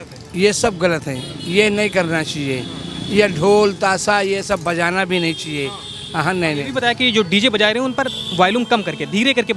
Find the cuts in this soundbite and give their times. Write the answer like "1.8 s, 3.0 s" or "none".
none